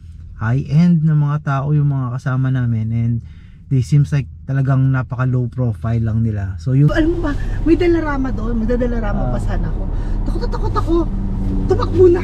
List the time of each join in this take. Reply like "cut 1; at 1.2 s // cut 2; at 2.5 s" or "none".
cut 1; at 6.9 s